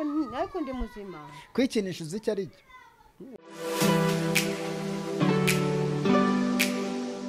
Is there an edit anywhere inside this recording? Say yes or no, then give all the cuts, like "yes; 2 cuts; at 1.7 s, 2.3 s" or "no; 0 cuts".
yes; 1 cut; at 3.4 s